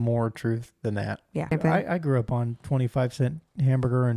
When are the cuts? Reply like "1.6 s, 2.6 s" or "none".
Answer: 1.5 s